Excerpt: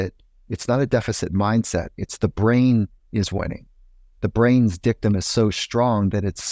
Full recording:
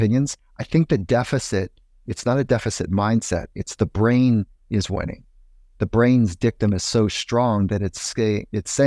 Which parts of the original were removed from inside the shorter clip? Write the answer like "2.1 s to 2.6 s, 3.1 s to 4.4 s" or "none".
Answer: none